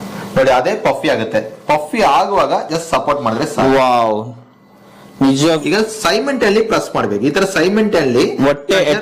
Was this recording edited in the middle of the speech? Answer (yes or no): yes